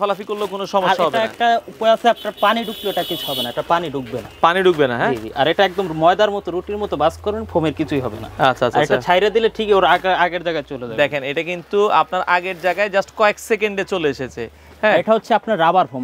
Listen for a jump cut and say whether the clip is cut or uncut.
uncut